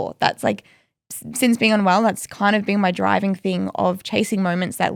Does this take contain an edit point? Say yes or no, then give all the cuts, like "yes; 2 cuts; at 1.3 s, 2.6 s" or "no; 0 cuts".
no; 0 cuts